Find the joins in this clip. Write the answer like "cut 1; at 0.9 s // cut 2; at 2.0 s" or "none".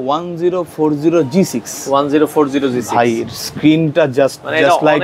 none